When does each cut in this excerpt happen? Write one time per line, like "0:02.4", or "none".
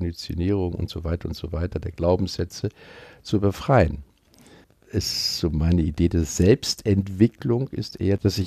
0:04.4